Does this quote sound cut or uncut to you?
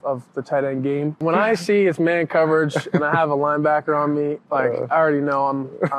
cut